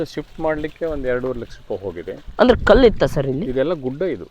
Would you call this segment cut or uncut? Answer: uncut